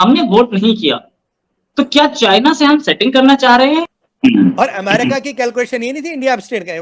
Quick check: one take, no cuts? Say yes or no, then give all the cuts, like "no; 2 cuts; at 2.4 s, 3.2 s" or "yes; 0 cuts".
no; 1 cut; at 3.8 s